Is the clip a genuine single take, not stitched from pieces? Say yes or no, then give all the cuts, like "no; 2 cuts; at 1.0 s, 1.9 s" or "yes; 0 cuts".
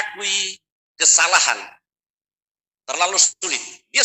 yes; 0 cuts